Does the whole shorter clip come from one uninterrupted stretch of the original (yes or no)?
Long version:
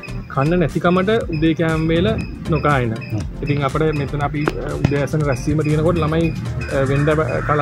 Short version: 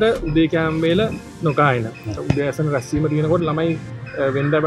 no